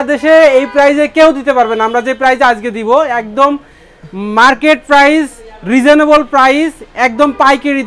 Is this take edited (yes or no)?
no